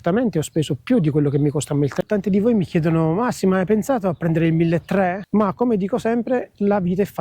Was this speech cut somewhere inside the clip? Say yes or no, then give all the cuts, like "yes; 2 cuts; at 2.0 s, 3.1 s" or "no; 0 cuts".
yes; 2 cuts; at 1.9 s, 5.2 s